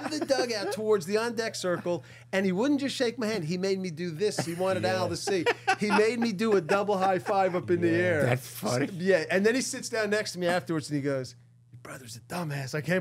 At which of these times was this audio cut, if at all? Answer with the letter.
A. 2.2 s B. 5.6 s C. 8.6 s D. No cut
D